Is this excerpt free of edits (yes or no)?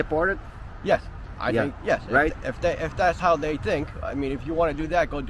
yes